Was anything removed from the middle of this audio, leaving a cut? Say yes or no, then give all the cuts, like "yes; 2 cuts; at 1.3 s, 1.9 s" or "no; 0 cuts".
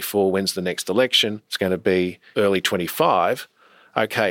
yes; 2 cuts; at 1.4 s, 2.2 s